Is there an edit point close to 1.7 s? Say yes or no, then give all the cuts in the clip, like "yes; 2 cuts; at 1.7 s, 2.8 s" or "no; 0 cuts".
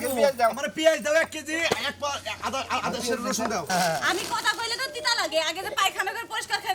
no; 1 cut; at 3.7 s